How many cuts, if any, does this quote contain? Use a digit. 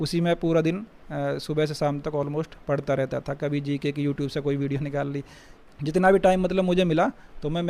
0